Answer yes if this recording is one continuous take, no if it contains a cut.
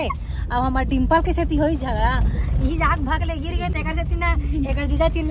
yes